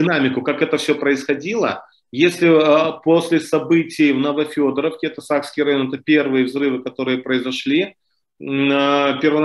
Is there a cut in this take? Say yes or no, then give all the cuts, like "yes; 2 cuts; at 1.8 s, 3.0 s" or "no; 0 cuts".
no; 0 cuts